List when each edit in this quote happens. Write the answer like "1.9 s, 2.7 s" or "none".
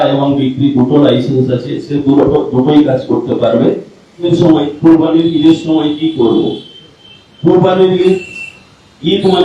4.3 s